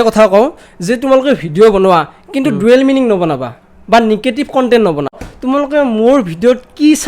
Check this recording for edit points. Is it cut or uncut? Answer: cut